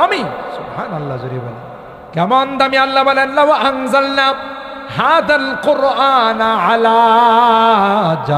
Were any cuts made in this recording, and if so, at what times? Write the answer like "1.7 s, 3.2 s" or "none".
2.0 s